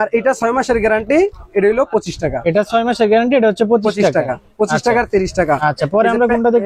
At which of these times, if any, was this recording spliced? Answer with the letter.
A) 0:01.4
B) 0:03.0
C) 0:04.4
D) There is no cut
D